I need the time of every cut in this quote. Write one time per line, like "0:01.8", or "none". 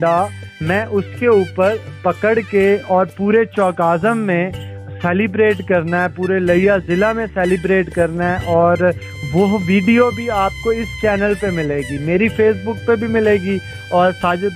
none